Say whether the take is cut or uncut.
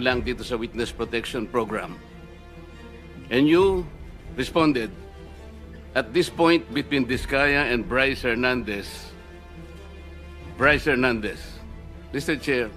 uncut